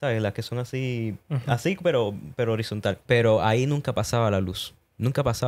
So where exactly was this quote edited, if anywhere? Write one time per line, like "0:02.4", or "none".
0:03.0